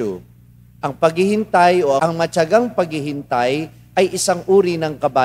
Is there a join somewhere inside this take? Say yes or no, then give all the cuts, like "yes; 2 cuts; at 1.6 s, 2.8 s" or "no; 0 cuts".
yes; 1 cut; at 2.0 s